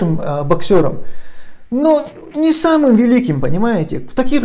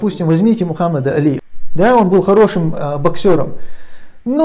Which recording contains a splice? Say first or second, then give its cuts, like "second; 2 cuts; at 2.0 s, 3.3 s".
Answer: second; 1 cut; at 1.4 s